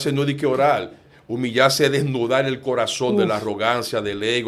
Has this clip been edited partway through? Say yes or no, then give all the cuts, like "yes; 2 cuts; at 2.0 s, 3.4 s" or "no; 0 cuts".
no; 0 cuts